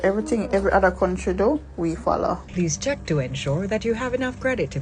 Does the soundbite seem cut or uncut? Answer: cut